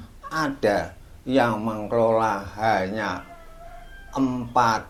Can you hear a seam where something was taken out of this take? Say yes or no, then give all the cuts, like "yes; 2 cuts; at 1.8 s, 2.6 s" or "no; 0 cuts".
no; 0 cuts